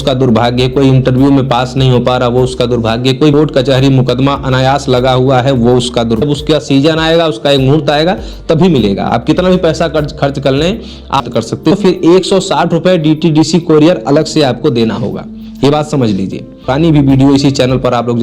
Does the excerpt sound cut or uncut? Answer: cut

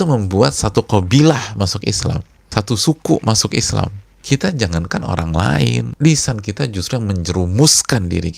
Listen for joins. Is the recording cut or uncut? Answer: cut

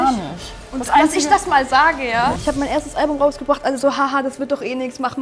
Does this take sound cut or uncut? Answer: cut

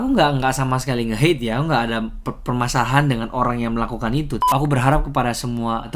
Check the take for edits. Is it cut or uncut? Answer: cut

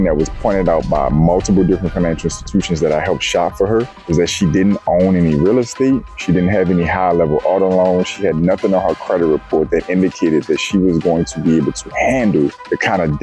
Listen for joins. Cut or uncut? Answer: uncut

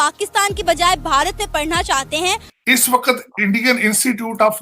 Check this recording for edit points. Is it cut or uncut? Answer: cut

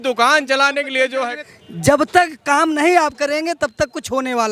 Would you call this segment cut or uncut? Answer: cut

